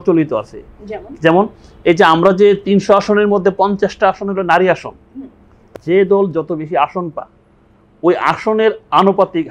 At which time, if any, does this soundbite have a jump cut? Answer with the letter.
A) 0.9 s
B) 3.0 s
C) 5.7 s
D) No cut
C